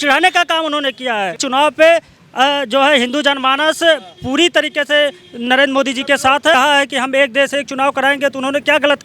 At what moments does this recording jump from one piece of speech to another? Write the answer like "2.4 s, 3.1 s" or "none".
1.4 s, 6.5 s